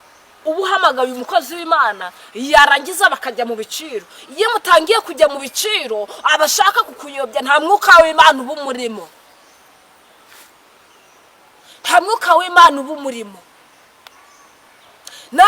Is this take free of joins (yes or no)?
yes